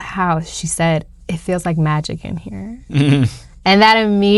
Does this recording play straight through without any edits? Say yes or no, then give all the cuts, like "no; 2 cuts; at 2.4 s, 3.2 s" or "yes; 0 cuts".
yes; 0 cuts